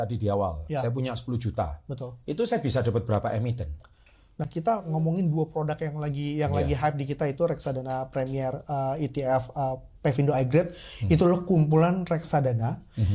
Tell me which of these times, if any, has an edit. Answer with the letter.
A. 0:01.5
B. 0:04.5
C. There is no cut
B